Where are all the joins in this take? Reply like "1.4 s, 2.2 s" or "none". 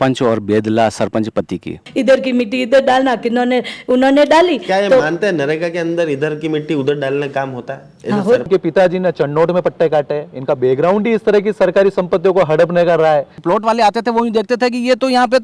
1.8 s, 8.5 s, 13.4 s